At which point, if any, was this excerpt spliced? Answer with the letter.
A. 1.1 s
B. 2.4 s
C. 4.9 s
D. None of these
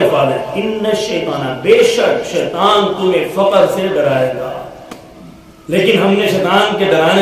D